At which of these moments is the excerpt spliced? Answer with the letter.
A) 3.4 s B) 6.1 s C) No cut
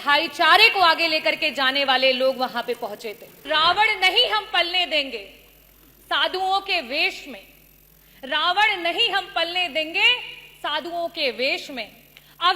A